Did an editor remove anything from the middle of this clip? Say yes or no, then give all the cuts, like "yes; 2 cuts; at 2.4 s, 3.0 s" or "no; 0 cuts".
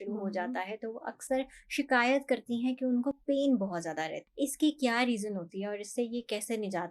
yes; 1 cut; at 4.2 s